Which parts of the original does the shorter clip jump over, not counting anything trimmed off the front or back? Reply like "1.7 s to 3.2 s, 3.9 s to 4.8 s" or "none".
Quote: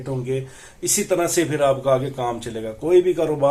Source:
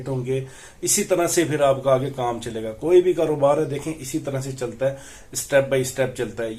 none